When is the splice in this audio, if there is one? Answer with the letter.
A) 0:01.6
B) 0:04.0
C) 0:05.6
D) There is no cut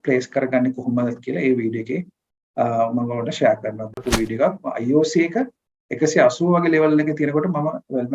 B